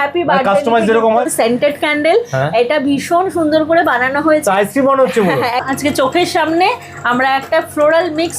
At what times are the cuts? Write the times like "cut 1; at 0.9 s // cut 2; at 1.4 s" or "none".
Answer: cut 1; at 1.3 s // cut 2; at 5.6 s